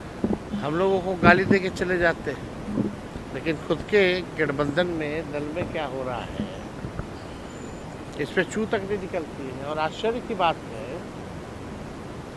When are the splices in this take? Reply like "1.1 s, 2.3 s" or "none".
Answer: none